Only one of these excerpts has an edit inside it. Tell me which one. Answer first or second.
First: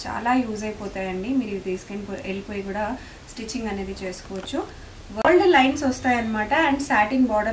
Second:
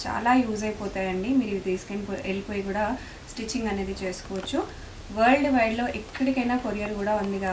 first